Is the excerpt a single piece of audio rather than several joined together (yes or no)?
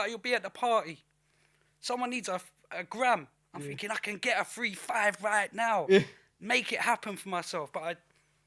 yes